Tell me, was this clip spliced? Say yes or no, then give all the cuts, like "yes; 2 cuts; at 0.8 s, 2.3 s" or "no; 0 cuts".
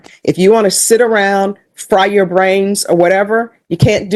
no; 0 cuts